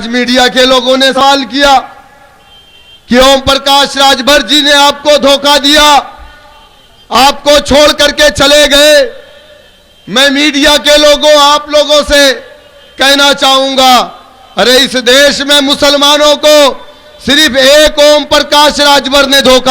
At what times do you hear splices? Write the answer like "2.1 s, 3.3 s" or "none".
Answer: 1.2 s